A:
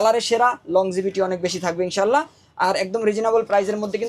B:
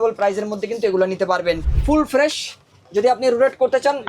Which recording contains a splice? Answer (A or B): B